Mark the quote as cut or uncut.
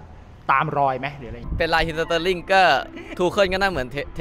cut